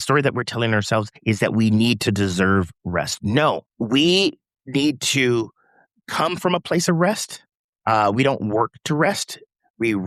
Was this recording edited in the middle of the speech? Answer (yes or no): yes